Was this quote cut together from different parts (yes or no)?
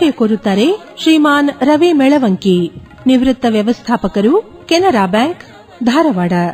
no